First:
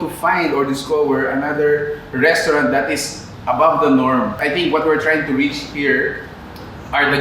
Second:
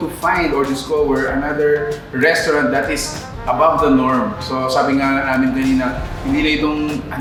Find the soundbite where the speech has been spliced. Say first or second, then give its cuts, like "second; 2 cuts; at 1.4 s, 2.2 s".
first; 1 cut; at 4.4 s